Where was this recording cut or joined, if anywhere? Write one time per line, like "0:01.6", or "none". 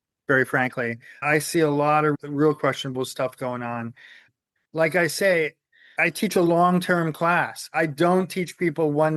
none